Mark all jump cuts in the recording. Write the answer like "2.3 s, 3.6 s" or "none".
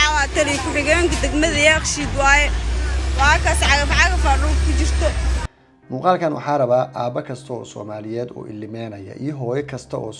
5.5 s